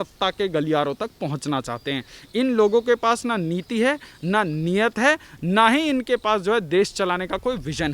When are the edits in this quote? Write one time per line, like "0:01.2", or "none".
none